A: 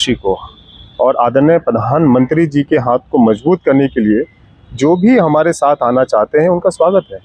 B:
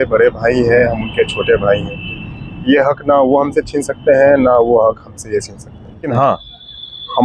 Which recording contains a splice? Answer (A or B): B